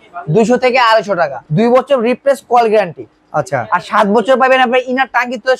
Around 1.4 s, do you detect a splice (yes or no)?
yes